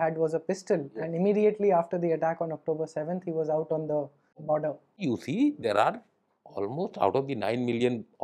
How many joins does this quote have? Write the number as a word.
two